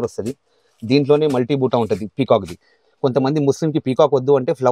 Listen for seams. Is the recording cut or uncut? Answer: uncut